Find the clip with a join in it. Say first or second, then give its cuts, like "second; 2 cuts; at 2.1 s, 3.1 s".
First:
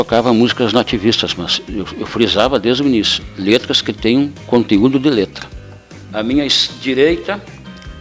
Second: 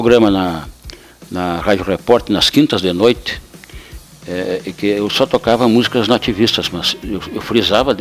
first; 1 cut; at 6.0 s